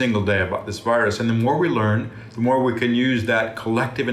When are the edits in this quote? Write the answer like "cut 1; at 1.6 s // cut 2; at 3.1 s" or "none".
none